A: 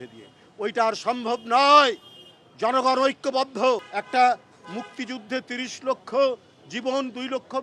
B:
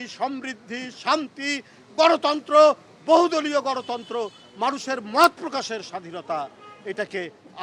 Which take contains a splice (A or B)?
A